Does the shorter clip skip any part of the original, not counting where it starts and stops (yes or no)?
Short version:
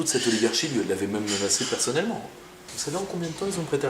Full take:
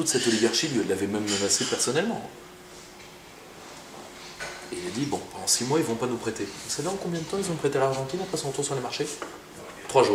yes